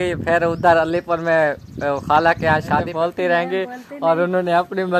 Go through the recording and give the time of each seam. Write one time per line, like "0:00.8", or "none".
0:02.9